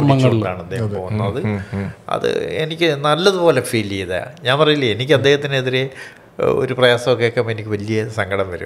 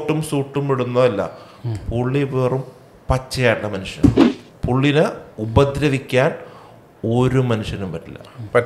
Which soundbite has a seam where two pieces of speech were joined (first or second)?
second